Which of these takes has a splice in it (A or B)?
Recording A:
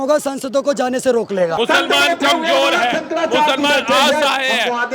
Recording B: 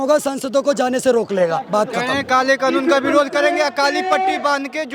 A